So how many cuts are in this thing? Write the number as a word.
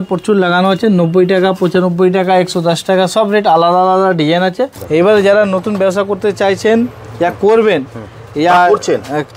one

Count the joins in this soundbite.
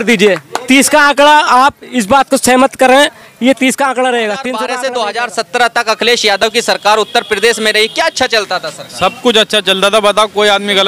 one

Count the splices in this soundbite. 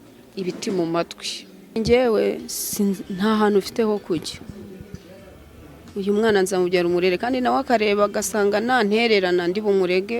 one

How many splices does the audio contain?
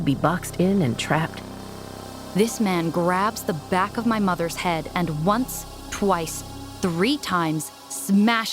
one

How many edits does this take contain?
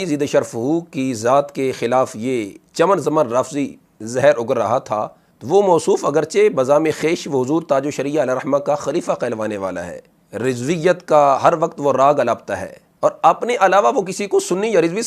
zero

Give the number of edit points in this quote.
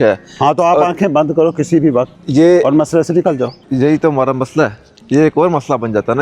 two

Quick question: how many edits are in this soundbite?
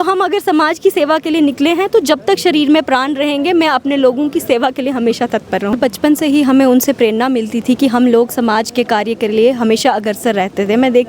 one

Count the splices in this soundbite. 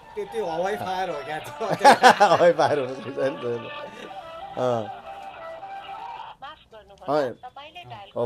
zero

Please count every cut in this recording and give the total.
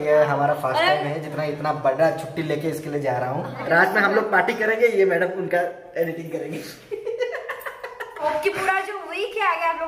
two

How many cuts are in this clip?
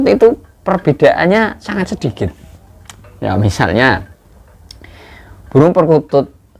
zero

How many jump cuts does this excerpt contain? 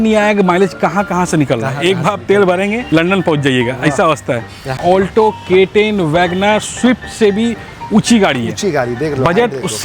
one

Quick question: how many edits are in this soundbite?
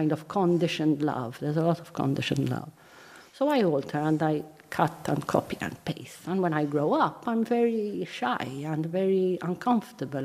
zero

